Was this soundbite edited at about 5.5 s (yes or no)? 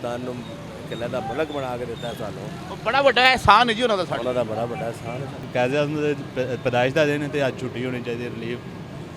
yes